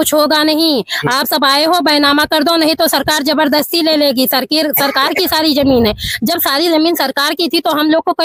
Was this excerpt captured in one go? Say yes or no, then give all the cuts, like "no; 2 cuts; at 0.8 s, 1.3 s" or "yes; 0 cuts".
yes; 0 cuts